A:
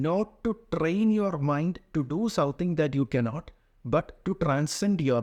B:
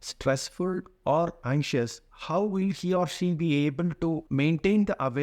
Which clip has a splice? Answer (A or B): B